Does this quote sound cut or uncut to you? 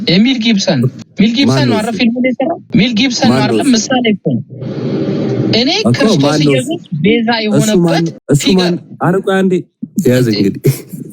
cut